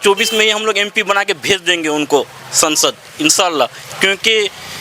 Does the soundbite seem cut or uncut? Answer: uncut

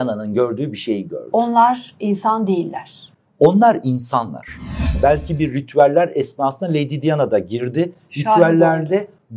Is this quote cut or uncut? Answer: cut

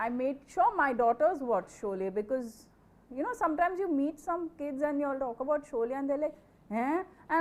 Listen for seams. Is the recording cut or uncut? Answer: uncut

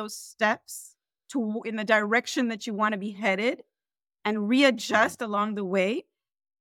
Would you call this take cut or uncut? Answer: uncut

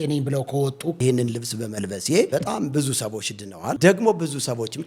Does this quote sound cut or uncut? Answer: cut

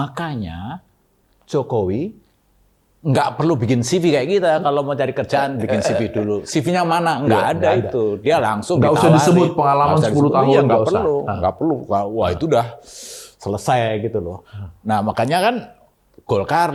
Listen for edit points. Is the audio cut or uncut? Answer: uncut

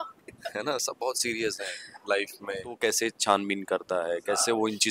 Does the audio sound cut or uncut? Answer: cut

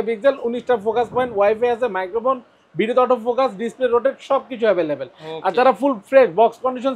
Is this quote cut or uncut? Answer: uncut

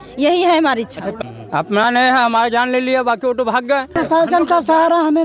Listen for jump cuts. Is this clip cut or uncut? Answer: cut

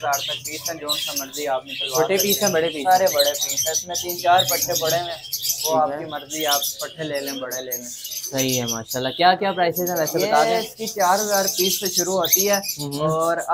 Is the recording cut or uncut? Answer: uncut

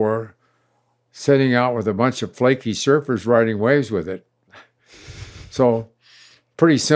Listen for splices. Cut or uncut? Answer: uncut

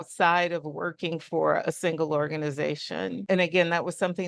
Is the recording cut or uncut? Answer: cut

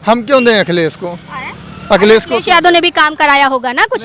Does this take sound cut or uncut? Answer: uncut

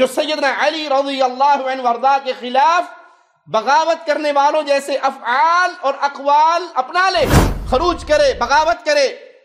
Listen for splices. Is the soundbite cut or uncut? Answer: cut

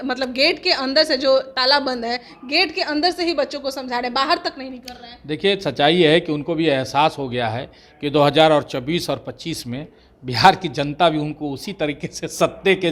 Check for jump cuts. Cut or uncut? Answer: uncut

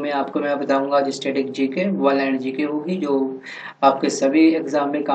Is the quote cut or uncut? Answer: uncut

